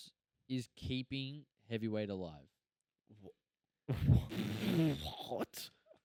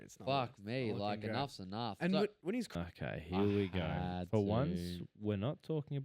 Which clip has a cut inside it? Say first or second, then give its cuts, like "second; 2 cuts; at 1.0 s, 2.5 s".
second; 1 cut; at 2.7 s